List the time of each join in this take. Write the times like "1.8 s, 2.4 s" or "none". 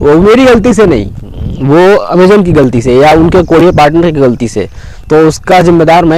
none